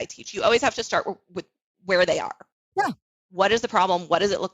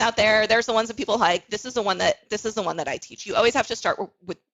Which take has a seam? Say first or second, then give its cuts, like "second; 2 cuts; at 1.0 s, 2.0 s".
first; 1 cut; at 2.5 s